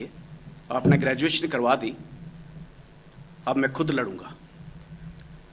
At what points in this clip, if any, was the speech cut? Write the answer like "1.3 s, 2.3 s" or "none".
none